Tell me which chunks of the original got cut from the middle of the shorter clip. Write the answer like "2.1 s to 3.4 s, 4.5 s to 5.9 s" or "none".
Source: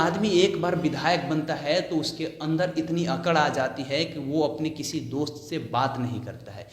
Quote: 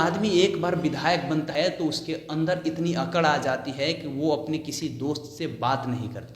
1.5 s to 1.6 s